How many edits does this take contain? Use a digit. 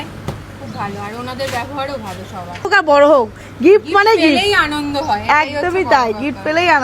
1